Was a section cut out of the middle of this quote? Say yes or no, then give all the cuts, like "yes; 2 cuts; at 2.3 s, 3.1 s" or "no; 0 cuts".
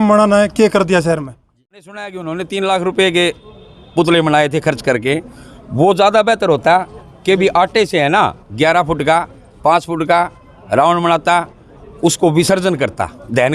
yes; 1 cut; at 1.7 s